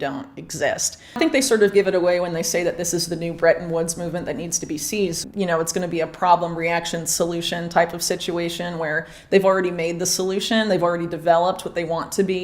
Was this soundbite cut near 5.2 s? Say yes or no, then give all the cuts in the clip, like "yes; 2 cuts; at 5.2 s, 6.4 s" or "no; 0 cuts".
yes; 2 cuts; at 1.2 s, 5.2 s